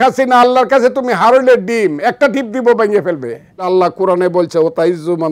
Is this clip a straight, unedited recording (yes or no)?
no